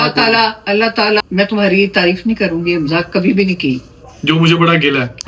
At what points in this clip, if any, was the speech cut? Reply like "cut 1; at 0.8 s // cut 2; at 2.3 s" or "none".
cut 1; at 1.2 s